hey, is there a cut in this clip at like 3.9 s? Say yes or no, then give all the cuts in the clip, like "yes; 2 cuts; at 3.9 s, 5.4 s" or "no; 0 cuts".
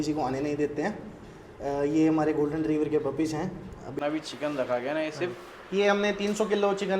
yes; 1 cut; at 3.9 s